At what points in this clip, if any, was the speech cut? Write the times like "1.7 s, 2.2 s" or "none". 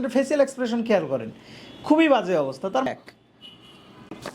2.9 s